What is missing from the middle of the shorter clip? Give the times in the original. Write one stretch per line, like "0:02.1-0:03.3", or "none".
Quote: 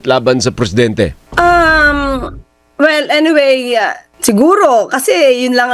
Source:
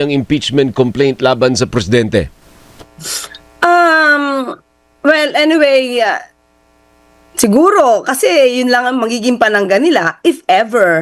0:02.4-0:03.5
0:06.3-0:07.2